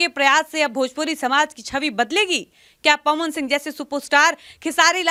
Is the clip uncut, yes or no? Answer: yes